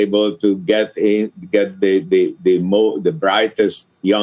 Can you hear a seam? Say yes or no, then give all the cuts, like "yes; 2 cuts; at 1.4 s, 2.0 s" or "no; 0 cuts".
no; 0 cuts